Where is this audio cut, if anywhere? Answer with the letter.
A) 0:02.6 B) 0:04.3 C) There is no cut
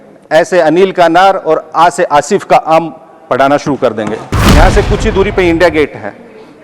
B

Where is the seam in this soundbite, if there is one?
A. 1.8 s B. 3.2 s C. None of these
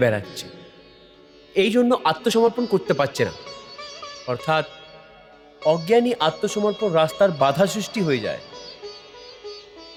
C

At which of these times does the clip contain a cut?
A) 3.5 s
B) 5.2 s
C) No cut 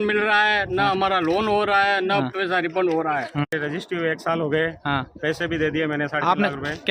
A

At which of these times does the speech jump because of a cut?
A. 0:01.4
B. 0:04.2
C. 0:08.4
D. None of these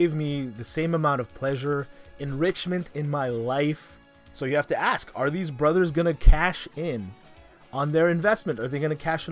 B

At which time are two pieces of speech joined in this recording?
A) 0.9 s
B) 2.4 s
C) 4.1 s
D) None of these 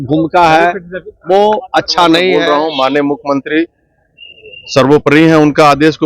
B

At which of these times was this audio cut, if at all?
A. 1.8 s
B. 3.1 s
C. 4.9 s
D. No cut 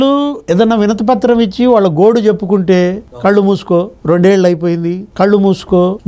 D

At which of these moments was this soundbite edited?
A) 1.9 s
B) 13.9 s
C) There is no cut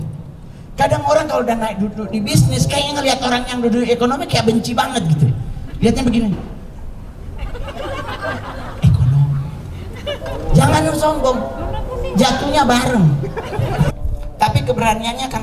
B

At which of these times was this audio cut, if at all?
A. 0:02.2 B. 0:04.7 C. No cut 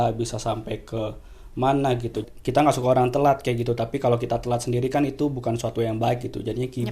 A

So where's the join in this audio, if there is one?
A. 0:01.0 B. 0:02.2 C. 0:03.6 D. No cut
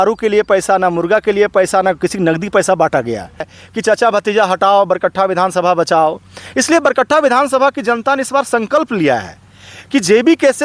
C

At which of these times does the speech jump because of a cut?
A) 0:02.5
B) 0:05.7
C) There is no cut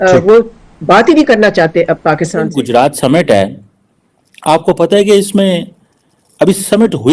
A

